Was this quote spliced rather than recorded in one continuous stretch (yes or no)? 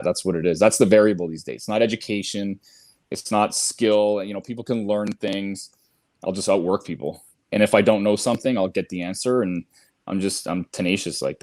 no